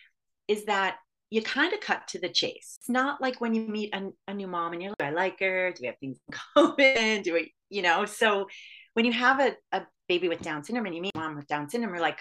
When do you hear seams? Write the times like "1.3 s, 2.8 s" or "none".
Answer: 2.8 s